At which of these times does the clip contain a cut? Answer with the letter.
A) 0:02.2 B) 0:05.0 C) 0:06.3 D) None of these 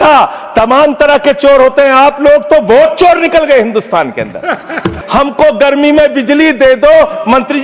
B